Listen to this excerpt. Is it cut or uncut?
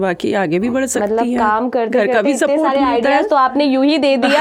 uncut